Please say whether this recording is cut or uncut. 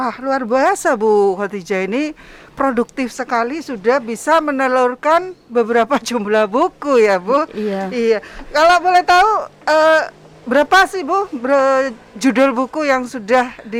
uncut